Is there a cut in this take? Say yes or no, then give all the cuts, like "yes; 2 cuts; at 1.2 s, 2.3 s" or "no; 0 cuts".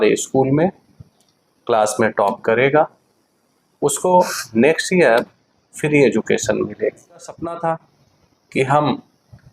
yes; 1 cut; at 7.6 s